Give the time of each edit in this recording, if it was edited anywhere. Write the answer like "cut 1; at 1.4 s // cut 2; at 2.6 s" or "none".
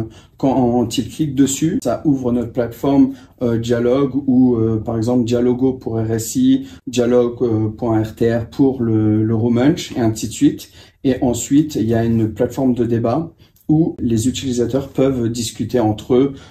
cut 1; at 1.8 s // cut 2; at 6.8 s // cut 3; at 14.0 s